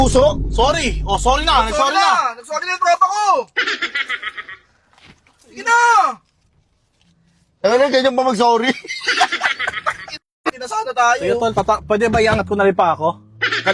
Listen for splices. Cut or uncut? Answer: cut